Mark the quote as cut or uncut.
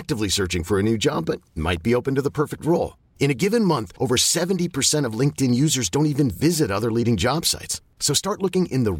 uncut